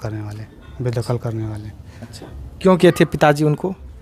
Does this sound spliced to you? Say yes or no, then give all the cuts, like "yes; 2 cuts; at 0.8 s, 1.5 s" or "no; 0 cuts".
no; 0 cuts